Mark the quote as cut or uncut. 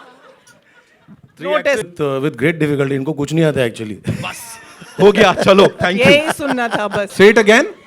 cut